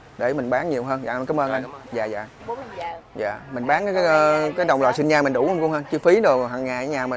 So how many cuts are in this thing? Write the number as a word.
one